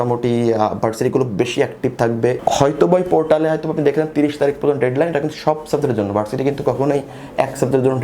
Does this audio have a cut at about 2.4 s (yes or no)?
yes